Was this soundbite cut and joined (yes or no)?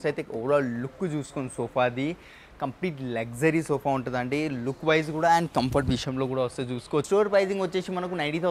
yes